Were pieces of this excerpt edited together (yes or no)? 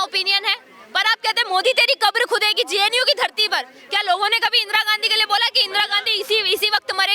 no